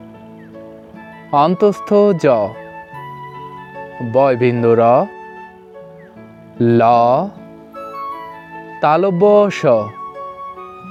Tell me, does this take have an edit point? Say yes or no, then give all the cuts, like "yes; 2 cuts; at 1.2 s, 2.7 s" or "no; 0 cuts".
no; 0 cuts